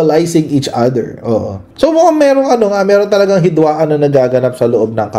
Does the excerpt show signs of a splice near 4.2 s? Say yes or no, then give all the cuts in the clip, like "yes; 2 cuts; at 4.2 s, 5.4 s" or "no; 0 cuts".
no; 1 cut; at 1.6 s